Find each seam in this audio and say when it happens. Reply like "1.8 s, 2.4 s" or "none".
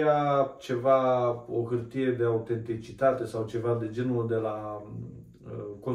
none